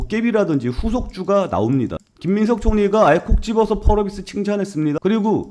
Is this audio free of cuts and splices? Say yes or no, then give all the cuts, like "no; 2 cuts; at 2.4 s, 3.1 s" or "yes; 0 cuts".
no; 1 cut; at 1.9 s